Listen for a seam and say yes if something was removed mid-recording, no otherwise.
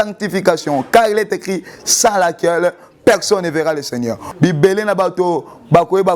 yes